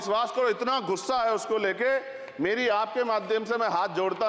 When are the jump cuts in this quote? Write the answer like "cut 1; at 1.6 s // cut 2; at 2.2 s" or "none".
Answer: none